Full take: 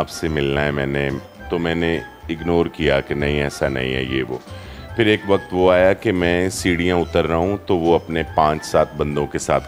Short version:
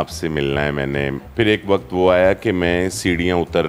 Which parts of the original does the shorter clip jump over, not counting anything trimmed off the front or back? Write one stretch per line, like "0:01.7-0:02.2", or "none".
0:01.2-0:04.8

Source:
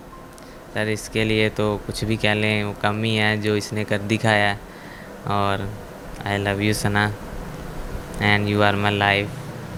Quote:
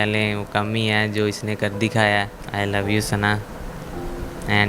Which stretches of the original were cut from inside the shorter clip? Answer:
0:04.7-0:06.1

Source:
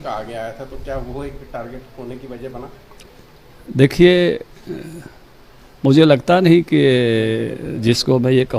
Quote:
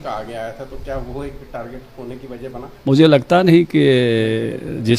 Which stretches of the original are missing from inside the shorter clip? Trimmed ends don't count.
0:02.7-0:05.7

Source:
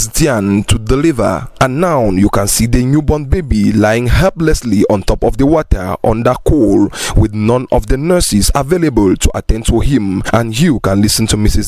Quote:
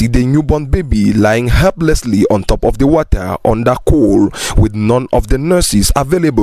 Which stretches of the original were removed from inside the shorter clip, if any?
none

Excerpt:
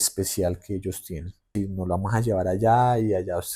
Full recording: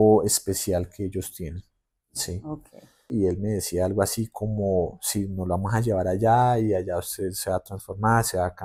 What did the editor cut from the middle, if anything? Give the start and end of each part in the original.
0:01.7-0:05.0

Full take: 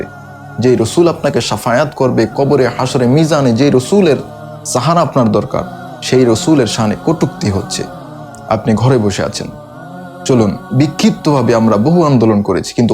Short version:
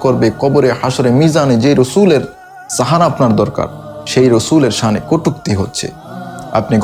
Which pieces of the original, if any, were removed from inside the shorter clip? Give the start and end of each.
none

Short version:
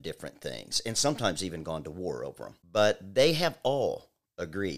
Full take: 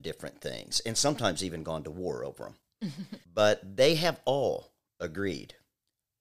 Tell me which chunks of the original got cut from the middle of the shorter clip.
0:02.5-0:03.1

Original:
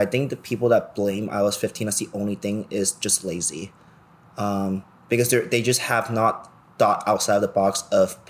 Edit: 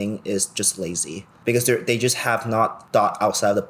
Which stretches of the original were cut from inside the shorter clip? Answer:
0:03.8-0:04.9
0:06.4-0:06.7

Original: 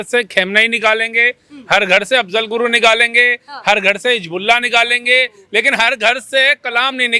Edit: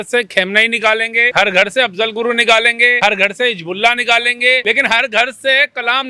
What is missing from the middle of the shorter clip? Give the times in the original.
0:01.3-0:01.6
0:03.3-0:03.6
0:05.3-0:05.5

